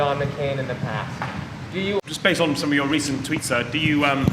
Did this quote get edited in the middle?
yes; 1 cut; at 2.0 s

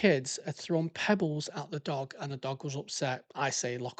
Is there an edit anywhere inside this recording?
no; 0 cuts

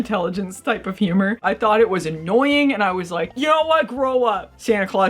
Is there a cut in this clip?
yes; 1 cut; at 1.4 s

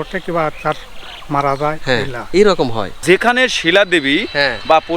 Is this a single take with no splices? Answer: no; 1 cut; at 3.0 s

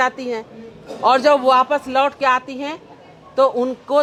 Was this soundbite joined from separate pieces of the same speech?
no; 0 cuts

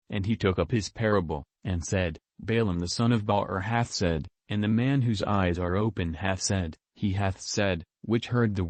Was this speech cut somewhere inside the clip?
no; 0 cuts

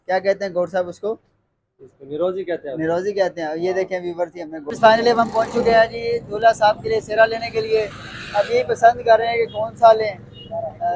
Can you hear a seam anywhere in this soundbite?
yes; 1 cut; at 4.6 s

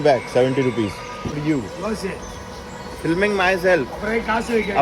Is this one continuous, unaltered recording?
no; 1 cut; at 1.3 s

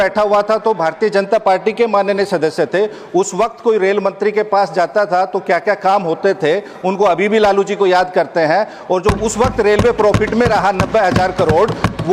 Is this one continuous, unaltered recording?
yes; 0 cuts

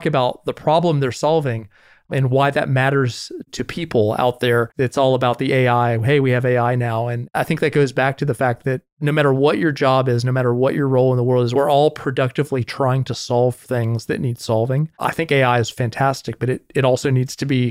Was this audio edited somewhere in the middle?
yes; 4 cuts; at 4.7 s, 7.2 s, 11.5 s, 14.9 s

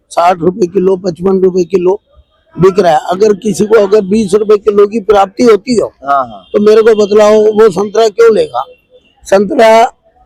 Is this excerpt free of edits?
yes; 0 cuts

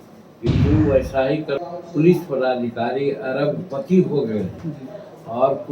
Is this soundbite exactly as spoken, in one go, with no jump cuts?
no; 1 cut; at 1.6 s

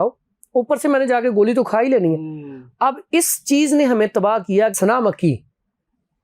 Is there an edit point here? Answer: yes; 1 cut; at 4.7 s

